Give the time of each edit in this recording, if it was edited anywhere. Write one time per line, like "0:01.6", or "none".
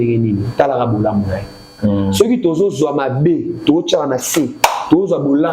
0:01.7